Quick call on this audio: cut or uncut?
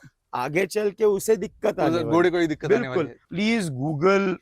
cut